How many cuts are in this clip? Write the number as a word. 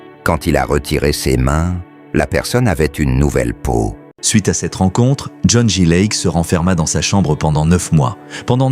one